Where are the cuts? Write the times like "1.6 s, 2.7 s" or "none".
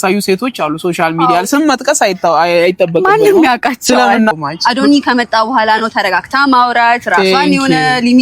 4.3 s